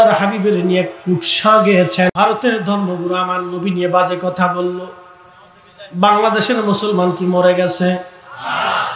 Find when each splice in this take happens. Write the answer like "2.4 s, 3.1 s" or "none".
2.1 s

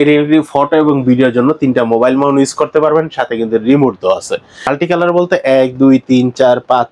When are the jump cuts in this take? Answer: 4.6 s

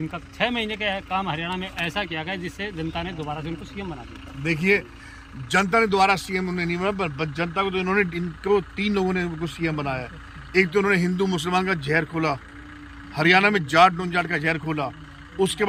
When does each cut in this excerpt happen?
none

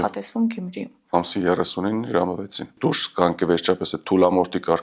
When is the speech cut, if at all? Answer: 2.7 s

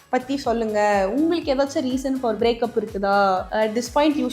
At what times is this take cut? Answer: 2.4 s

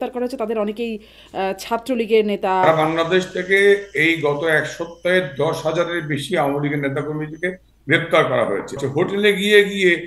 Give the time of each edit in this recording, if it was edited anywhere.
2.7 s, 8.8 s

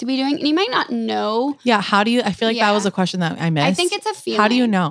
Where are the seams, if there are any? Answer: none

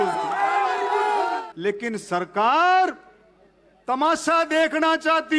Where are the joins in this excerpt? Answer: 1.4 s

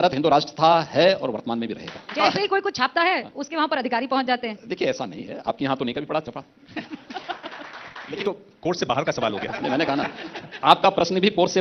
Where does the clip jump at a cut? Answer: 2.1 s, 8.1 s

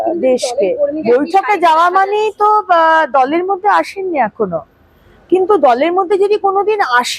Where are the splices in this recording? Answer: 1.0 s

